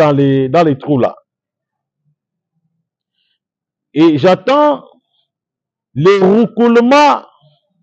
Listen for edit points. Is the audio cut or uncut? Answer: uncut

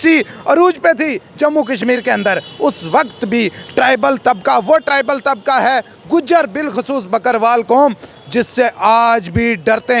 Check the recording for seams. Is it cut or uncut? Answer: uncut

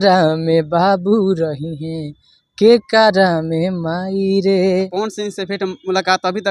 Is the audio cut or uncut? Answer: cut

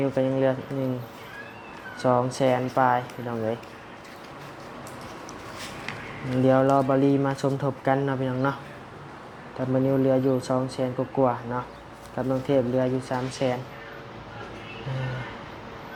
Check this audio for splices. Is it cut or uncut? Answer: uncut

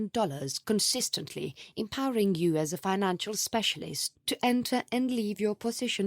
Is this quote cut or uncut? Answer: cut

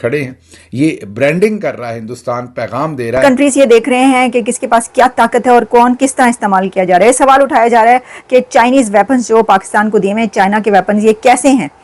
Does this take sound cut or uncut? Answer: cut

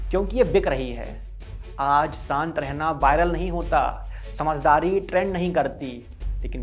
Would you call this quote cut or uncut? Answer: uncut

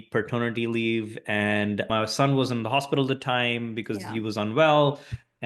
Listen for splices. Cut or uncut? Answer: cut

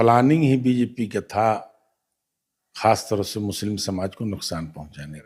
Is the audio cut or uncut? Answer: uncut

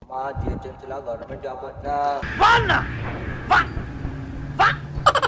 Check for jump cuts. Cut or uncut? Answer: uncut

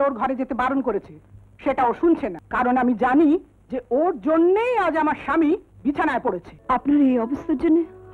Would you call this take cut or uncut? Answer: cut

